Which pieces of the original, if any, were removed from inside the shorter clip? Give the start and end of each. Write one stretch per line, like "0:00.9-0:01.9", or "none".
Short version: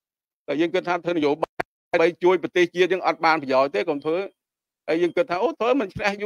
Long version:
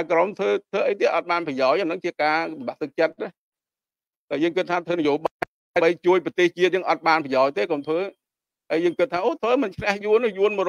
none